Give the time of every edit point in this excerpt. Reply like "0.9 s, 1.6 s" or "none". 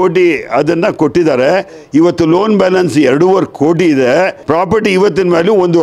none